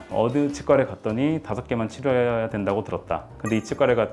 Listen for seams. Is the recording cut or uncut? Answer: uncut